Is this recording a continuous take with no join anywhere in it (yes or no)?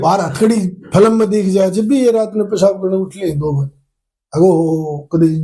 yes